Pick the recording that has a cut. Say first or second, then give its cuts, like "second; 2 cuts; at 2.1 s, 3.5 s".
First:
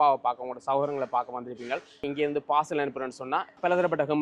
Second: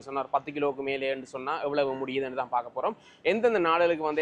first; 1 cut; at 2.1 s